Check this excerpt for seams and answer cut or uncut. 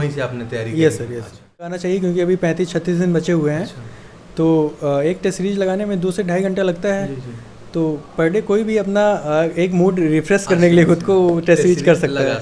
cut